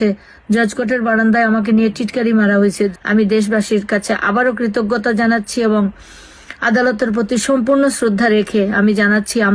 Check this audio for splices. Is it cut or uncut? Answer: cut